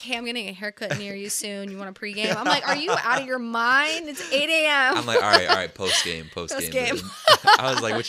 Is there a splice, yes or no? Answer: no